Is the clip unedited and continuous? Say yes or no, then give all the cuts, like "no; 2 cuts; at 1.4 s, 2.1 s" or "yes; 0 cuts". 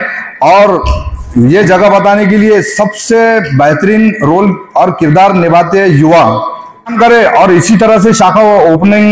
no; 1 cut; at 7.0 s